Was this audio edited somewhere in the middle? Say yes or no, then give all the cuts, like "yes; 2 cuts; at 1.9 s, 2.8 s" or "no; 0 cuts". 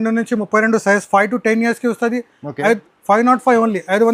no; 0 cuts